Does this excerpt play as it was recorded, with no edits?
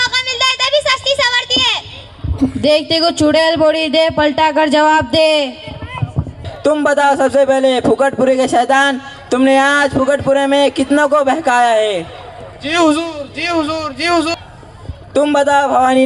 no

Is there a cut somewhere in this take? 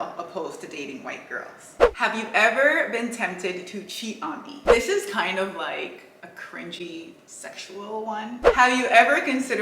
yes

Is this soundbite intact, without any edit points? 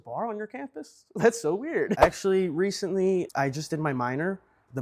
no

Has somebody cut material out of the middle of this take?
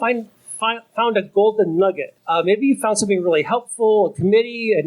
yes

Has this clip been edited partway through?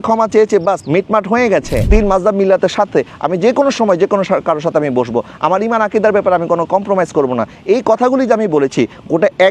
yes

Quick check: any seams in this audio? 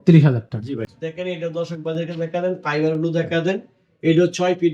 yes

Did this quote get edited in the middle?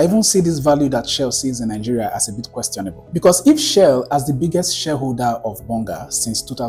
no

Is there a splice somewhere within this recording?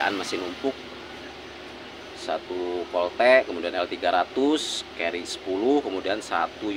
no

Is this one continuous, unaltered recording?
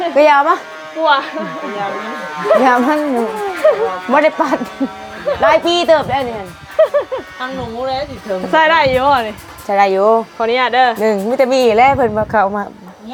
yes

